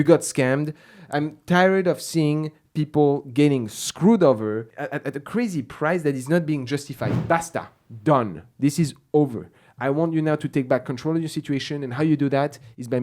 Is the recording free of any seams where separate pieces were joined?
no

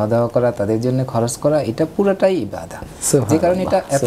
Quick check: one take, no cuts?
yes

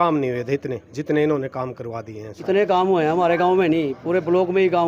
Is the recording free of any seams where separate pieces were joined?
no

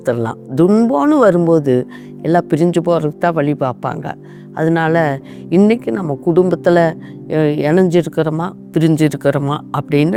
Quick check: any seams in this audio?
no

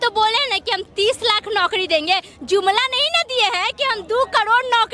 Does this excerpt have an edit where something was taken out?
no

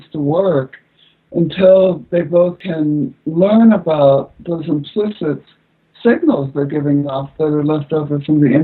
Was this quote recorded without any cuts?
no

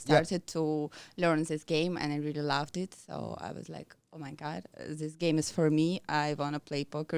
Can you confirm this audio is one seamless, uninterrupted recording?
yes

